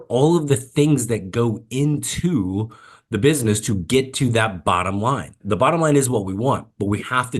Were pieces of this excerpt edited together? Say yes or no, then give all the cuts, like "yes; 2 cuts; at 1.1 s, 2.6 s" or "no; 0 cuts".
yes; 1 cut; at 5.3 s